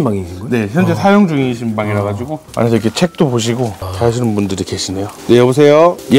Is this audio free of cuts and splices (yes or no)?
no